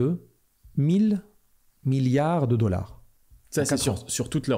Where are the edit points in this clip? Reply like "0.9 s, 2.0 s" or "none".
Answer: none